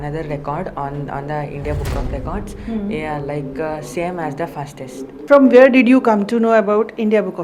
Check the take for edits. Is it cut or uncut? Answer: cut